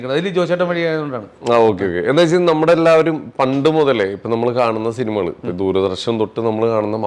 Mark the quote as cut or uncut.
uncut